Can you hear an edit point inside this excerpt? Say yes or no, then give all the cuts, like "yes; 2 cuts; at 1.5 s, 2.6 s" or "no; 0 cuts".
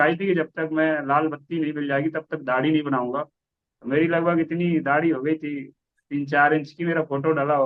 no; 0 cuts